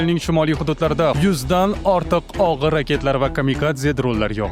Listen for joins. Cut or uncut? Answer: cut